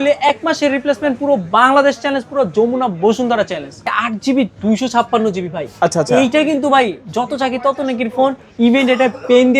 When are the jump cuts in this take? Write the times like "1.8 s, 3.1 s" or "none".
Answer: 3.8 s

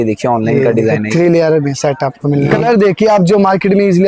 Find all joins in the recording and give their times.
2.6 s

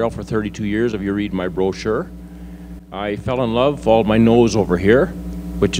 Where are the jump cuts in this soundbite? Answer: none

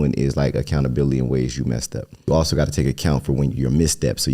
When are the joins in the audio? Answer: 2.2 s

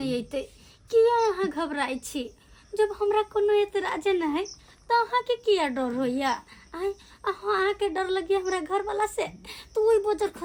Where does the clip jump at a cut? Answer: none

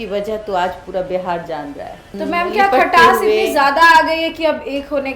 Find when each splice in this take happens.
2.1 s

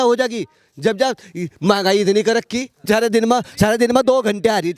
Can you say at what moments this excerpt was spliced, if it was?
2.8 s

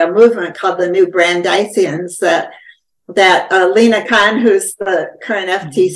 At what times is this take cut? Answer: none

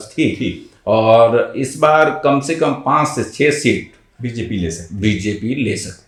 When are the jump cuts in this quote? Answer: none

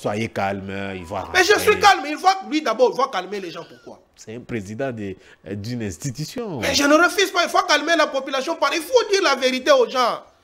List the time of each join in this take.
none

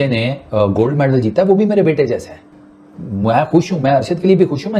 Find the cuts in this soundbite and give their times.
none

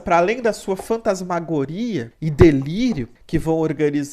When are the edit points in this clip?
2.2 s, 3.1 s

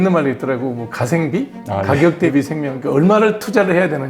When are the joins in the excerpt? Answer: 1.6 s

